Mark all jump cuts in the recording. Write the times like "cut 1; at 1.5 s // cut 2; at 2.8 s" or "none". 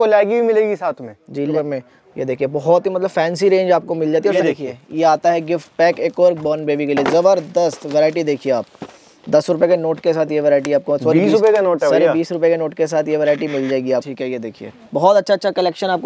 cut 1; at 1.5 s // cut 2; at 4.3 s // cut 3; at 14.1 s